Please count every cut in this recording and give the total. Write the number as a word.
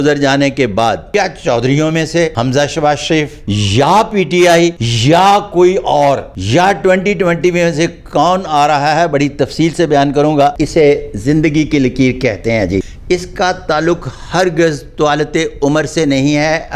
seven